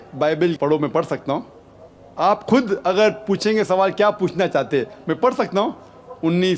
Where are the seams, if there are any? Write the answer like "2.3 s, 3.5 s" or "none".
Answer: none

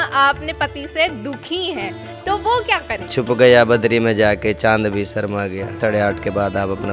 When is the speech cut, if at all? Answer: 3.1 s, 5.8 s

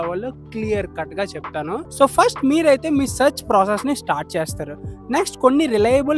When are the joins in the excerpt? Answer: 1.9 s

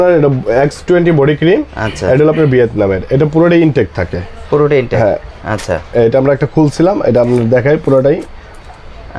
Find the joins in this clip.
none

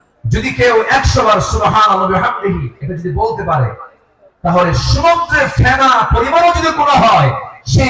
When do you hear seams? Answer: none

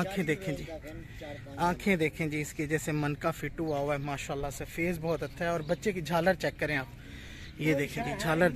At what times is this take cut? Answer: none

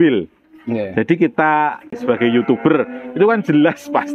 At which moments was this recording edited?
1.9 s

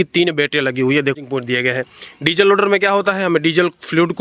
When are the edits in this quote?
1.2 s

